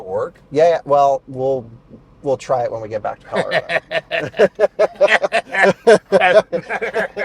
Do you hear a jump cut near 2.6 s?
no; 0 cuts

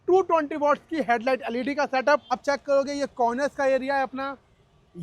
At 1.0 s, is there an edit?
no; 1 cut; at 2.3 s

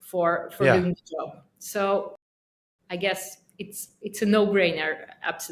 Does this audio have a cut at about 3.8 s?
no; 0 cuts

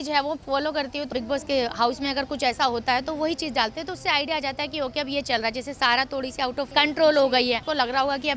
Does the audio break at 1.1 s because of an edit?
yes; 3 cuts; at 1.1 s, 6.7 s, 7.6 s

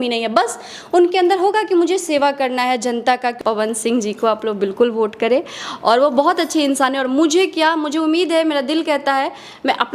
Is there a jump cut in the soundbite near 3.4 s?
yes; 1 cut; at 3.4 s

